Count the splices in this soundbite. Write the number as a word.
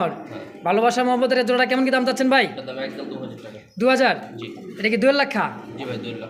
zero